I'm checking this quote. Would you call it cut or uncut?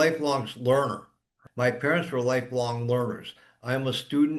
uncut